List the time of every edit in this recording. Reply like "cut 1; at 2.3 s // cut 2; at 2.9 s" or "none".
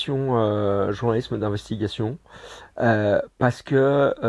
none